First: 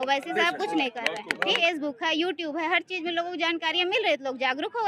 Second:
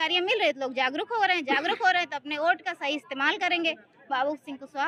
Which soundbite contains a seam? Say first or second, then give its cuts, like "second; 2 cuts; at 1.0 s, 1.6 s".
first; 1 cut; at 1.6 s